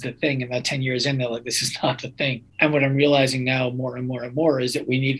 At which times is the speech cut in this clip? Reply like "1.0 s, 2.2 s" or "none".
2.5 s